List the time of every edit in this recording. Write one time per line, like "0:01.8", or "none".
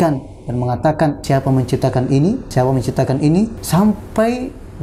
0:01.2
0:02.4
0:03.6